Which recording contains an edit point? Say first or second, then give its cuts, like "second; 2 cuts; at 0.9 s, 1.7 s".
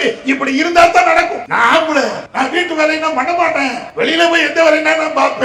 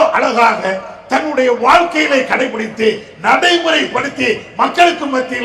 first; 3 cuts; at 1.4 s, 2.2 s, 3.8 s